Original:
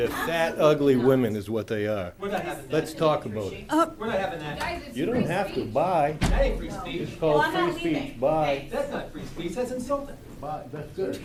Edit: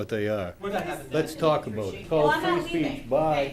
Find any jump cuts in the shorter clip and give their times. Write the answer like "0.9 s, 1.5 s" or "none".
2.0 s